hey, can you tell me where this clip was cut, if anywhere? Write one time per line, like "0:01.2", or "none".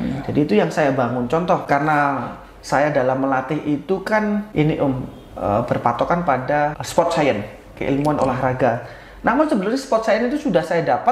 0:01.6
0:04.5
0:06.8